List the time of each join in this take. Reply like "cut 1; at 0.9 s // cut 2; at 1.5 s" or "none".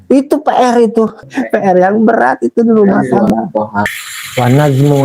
cut 1; at 1.3 s // cut 2; at 3.9 s